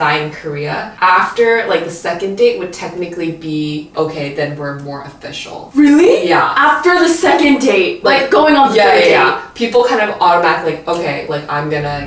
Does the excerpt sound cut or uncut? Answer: cut